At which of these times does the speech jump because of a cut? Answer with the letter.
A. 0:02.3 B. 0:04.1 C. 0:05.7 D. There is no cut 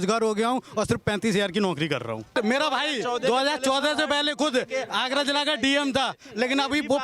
A